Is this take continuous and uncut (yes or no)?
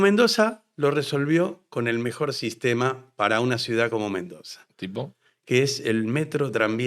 yes